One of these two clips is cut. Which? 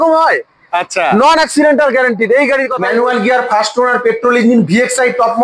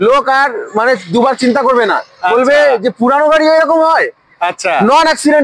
first; 1 cut; at 2.8 s

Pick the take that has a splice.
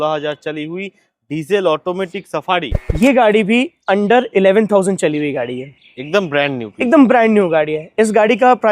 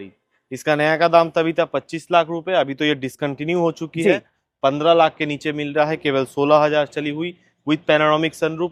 first; 1 cut; at 2.9 s

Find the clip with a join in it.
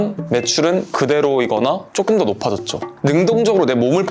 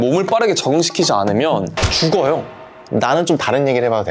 first; 1 cut; at 2.9 s

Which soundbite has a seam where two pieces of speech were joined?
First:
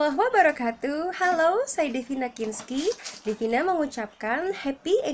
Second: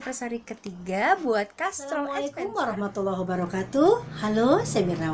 second; 1 cut; at 1.9 s

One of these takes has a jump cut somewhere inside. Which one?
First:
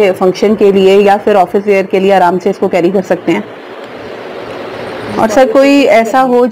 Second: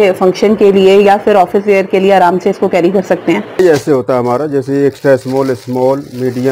second; 1 cut; at 3.6 s

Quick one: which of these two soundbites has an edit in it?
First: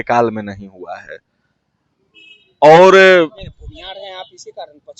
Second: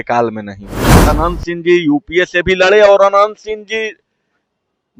second; 1 cut; at 1.0 s

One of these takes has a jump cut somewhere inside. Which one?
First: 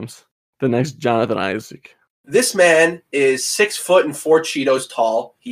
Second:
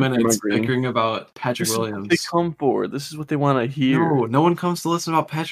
first; 1 cut; at 2.1 s

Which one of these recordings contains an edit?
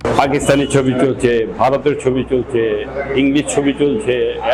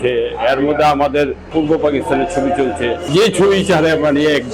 second; 2 cuts; at 1.5 s, 3.1 s

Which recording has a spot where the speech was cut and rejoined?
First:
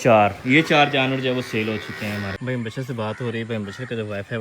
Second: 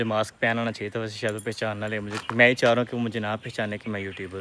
first; 1 cut; at 2.4 s

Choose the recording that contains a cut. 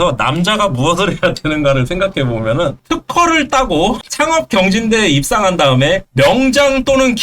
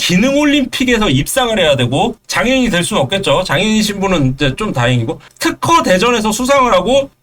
first; 1 cut; at 2.8 s

